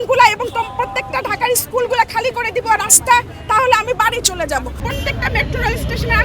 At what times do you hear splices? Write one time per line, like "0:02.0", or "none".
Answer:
0:04.8